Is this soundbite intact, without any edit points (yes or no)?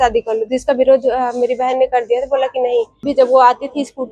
no